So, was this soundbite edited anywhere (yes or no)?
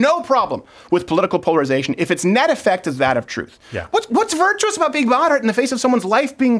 no